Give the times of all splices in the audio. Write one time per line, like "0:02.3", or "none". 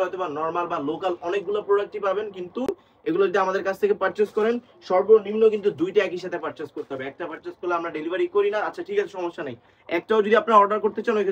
none